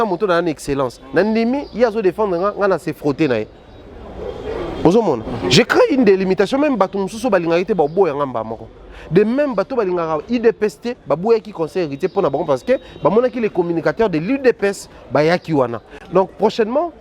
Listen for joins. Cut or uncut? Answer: uncut